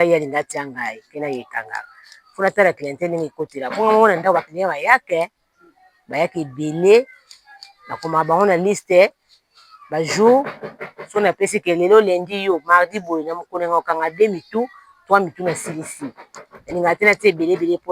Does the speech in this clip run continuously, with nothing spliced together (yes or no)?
yes